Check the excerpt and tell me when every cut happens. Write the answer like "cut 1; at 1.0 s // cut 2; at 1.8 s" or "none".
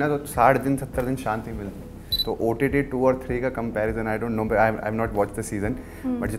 cut 1; at 2.0 s